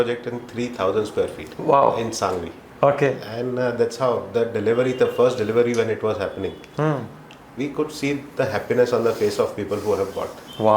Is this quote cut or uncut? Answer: cut